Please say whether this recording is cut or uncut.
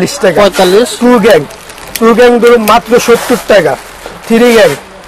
uncut